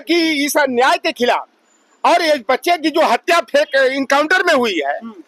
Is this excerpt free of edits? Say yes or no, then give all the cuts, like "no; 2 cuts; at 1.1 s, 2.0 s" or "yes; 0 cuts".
yes; 0 cuts